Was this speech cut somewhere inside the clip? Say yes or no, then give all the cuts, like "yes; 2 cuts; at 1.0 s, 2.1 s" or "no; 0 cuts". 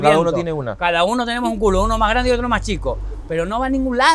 no; 0 cuts